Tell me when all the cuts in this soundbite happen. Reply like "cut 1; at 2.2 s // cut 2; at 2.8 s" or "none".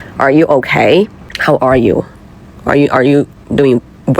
cut 1; at 1.2 s